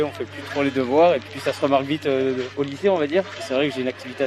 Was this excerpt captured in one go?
no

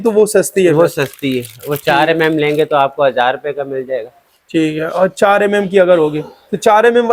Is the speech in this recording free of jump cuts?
yes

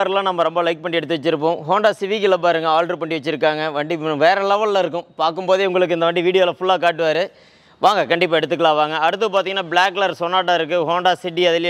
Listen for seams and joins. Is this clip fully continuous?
yes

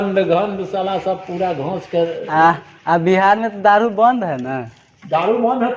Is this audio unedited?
yes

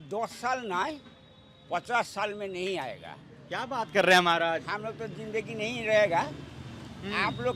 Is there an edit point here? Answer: no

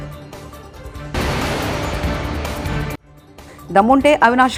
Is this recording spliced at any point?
no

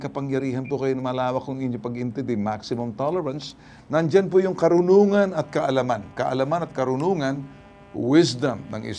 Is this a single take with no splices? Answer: yes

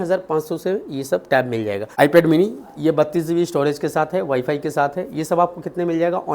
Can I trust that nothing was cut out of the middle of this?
no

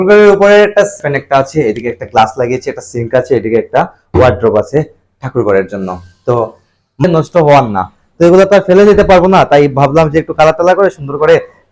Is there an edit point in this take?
yes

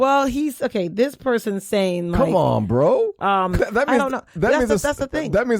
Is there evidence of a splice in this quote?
yes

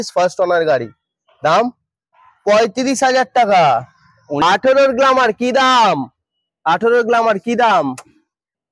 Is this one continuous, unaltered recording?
no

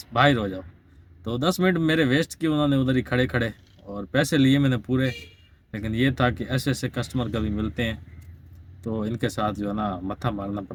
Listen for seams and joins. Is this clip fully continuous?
yes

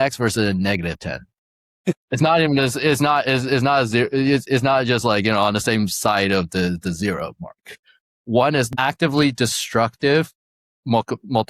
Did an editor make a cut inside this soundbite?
yes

